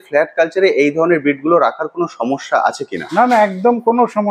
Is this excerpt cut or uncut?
uncut